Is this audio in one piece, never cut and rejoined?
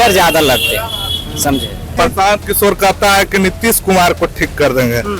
no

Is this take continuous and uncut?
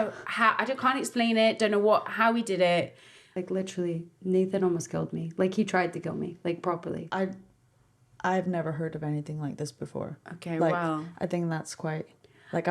no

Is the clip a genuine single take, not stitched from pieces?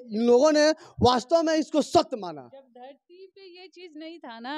yes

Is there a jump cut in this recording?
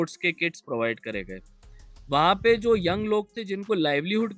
no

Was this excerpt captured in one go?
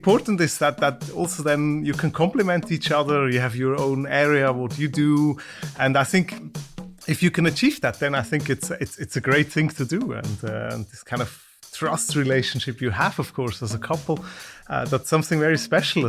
yes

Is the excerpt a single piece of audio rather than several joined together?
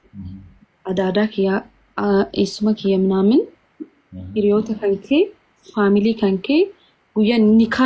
yes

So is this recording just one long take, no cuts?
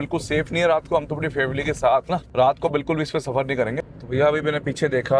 no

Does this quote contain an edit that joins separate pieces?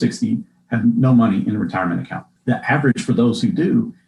no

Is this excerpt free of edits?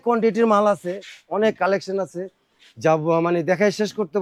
yes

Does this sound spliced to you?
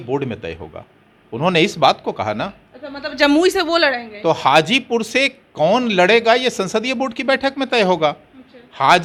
no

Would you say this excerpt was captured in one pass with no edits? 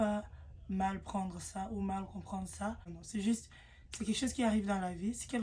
no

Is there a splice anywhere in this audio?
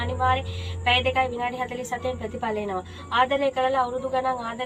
no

